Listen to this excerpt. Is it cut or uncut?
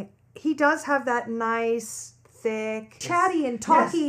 cut